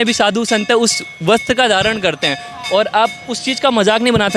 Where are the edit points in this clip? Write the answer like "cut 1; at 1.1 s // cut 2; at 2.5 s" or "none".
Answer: none